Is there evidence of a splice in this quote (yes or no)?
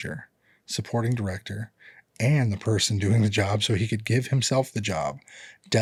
no